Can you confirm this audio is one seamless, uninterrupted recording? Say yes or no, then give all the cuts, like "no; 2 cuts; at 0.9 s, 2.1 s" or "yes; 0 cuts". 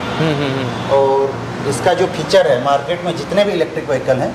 yes; 0 cuts